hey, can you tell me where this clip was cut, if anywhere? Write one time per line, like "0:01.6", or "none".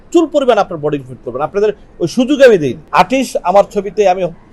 0:02.8